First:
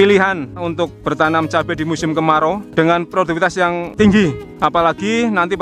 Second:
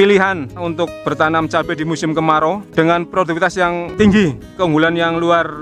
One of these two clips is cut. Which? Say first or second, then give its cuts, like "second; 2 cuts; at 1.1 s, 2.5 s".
second; 1 cut; at 4.4 s